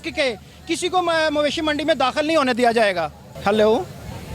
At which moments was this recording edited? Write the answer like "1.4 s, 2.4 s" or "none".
3.2 s